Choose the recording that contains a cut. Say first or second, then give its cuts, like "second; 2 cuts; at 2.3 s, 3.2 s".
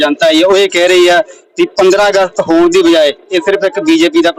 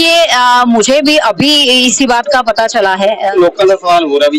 second; 1 cut; at 3.2 s